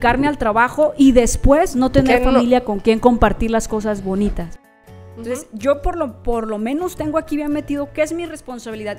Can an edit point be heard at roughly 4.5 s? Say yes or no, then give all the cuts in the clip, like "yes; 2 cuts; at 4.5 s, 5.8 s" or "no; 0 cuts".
yes; 1 cut; at 4.5 s